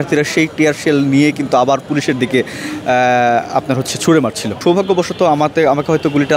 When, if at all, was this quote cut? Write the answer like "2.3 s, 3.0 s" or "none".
4.6 s